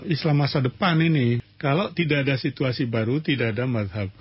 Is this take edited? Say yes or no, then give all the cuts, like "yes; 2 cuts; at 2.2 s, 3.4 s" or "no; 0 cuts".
yes; 1 cut; at 1.5 s